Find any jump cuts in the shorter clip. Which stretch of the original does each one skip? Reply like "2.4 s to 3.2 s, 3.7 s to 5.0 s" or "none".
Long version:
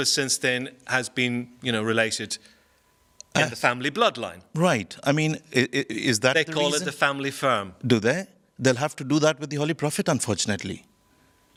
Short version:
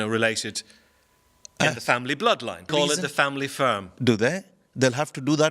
4.4 s to 6.5 s